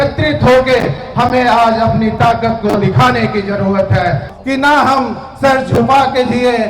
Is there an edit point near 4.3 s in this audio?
yes; 1 cut; at 4.3 s

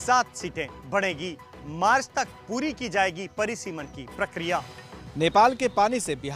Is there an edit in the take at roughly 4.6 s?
yes; 1 cut; at 4.6 s

